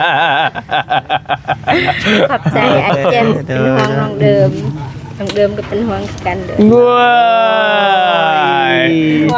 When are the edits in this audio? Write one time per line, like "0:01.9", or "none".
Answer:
none